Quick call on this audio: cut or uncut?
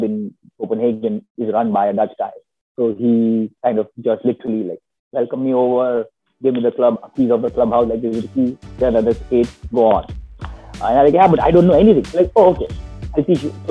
uncut